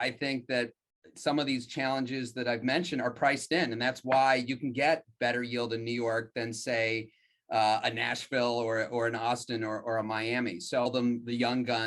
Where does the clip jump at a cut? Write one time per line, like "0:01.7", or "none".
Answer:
0:10.9